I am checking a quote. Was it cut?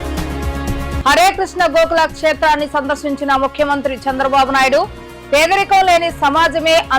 yes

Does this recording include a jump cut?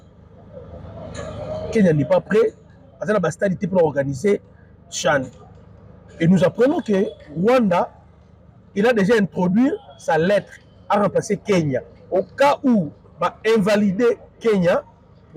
no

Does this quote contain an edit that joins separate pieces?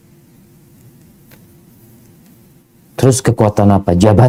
no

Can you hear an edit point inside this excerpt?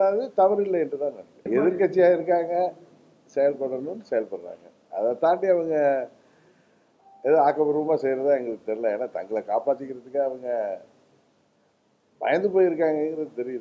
yes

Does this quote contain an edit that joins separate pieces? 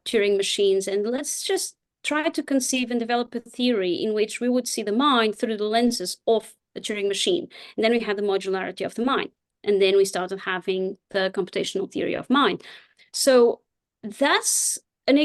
no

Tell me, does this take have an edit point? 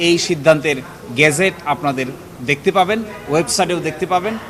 no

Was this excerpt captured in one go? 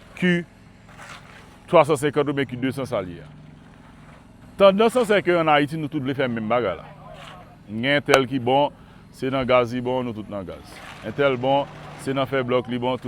no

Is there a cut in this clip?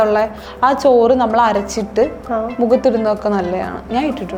no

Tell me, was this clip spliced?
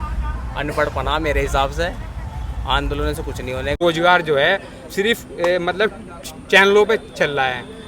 yes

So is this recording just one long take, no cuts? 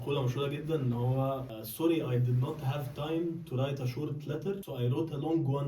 no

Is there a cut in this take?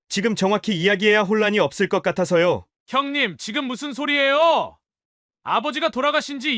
yes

